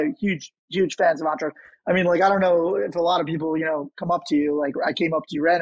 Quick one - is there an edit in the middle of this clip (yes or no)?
no